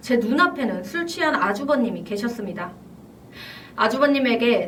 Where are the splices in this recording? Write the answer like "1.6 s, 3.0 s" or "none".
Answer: none